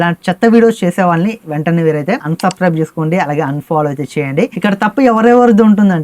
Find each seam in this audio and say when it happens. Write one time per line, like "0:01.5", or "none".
0:04.5

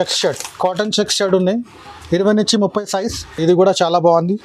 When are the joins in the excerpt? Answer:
0:03.4

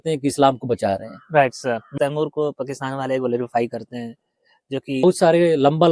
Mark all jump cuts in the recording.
0:02.0
0:05.0

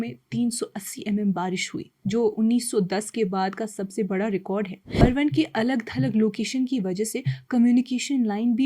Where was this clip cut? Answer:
0:05.0

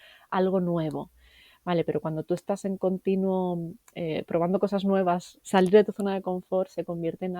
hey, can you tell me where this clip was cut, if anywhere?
0:05.3

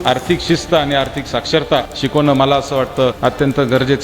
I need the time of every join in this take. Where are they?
0:01.9
0:03.2

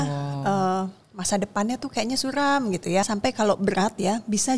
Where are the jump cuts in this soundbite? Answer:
0:03.1

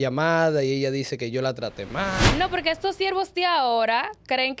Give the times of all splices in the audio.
0:02.2

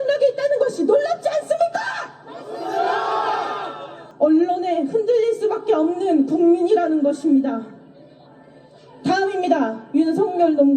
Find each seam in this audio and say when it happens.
0:04.0

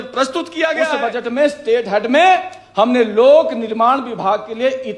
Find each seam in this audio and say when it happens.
0:00.9

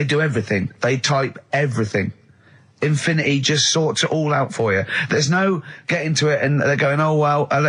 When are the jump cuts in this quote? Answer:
none

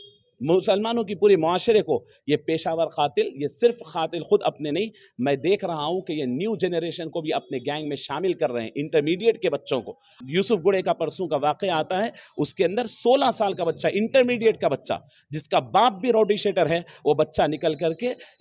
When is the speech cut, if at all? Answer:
0:10.1

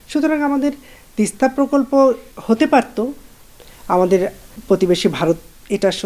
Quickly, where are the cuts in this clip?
0:02.3
0:04.5

